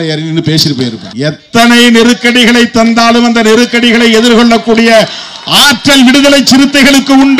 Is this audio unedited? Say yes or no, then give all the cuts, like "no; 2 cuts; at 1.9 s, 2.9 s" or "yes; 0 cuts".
no; 1 cut; at 1.0 s